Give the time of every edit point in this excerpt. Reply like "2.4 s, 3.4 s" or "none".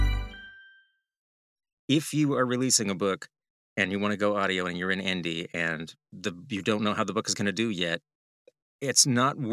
1.2 s